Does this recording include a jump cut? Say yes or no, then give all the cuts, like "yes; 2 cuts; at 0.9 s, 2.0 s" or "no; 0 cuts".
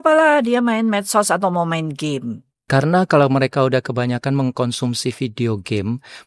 yes; 1 cut; at 2.5 s